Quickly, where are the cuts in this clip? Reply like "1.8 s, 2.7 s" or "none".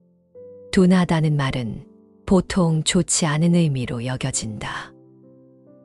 0.7 s, 4.9 s